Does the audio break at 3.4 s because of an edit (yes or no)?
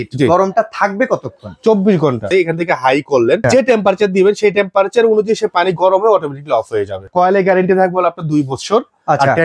yes